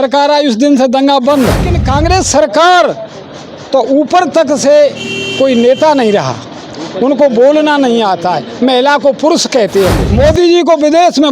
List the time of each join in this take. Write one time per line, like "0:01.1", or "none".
0:01.8
0:10.0